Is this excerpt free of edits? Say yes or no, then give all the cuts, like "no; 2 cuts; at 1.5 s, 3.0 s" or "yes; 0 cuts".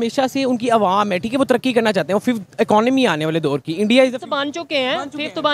yes; 0 cuts